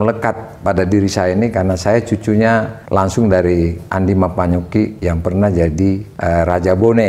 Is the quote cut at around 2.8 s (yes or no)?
yes